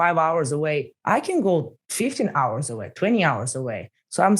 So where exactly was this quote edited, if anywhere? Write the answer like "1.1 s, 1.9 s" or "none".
0.9 s, 1.8 s